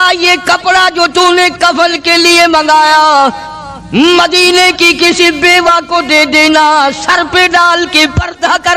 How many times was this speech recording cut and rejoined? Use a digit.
0